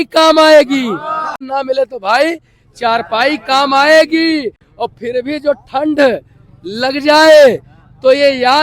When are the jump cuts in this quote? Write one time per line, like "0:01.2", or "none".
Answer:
0:01.5